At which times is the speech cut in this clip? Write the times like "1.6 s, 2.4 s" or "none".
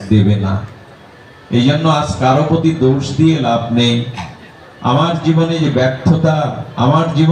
none